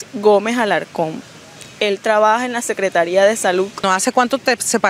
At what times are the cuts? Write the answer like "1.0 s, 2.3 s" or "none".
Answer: none